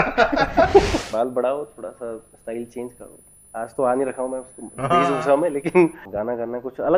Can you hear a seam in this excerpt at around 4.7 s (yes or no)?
no